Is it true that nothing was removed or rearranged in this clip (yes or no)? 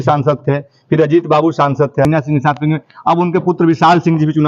no